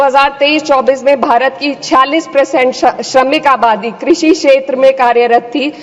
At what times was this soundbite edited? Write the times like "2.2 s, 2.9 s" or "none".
none